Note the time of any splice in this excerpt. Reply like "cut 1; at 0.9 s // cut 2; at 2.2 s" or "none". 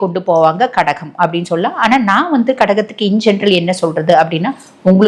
none